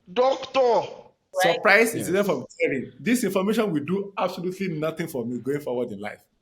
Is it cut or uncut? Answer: cut